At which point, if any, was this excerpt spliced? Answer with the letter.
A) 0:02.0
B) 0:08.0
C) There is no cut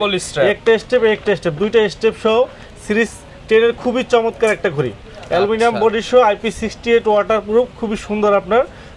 C